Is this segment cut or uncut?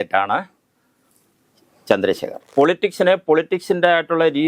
cut